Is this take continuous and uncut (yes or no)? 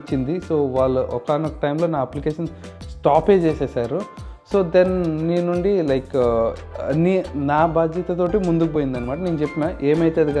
yes